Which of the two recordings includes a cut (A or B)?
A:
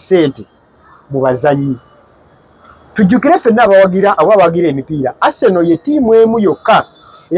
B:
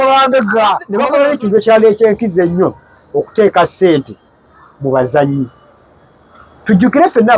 B